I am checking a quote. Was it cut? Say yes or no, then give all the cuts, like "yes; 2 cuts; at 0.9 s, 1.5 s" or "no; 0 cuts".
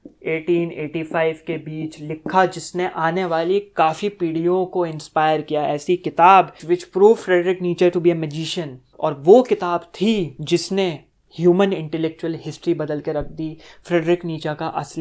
yes; 2 cuts; at 6.6 s, 10.3 s